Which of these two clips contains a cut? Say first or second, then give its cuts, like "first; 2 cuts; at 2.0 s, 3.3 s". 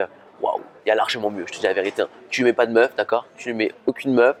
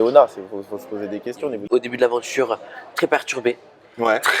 second; 1 cut; at 1.6 s